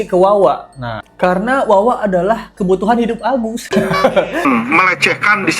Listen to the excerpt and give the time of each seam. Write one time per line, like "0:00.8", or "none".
0:04.4

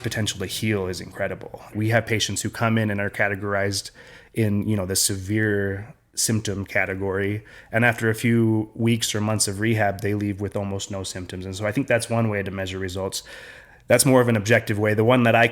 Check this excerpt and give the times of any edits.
0:01.7

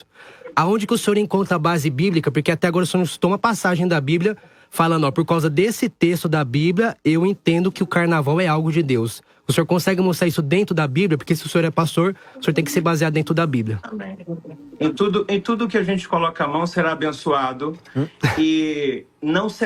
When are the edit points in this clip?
none

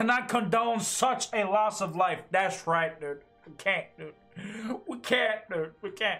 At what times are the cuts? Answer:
none

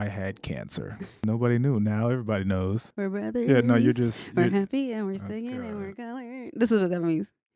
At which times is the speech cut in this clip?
0:01.2
0:02.9

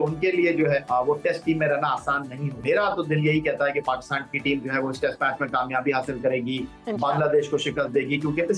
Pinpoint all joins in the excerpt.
0:00.8
0:02.4

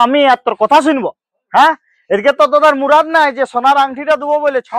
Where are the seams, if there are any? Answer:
none

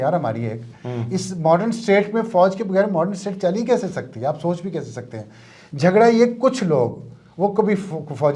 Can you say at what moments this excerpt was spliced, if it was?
none

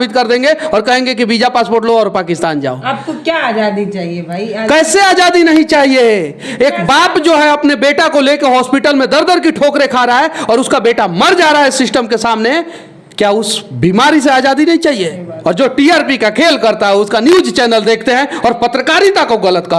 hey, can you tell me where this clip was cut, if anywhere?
0:15.2

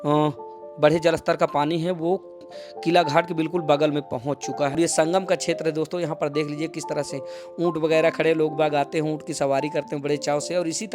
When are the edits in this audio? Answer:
0:04.8

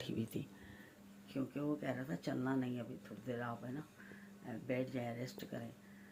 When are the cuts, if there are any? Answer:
none

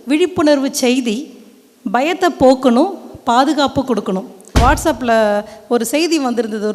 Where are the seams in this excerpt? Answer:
0:04.6

